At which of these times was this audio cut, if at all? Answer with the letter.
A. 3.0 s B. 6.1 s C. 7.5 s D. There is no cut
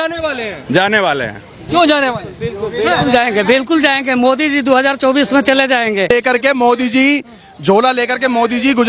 B